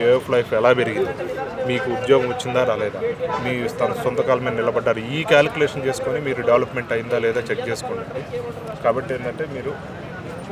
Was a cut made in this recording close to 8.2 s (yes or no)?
no